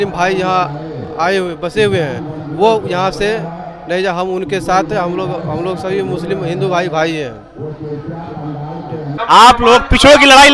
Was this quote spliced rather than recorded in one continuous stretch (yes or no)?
yes